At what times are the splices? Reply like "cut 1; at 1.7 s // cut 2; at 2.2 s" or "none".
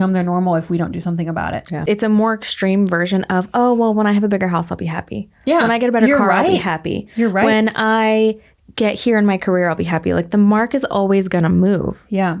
cut 1; at 1.8 s